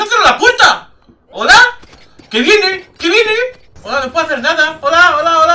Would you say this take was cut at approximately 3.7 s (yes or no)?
yes